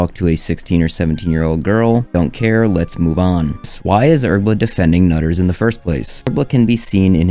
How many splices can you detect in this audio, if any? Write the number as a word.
two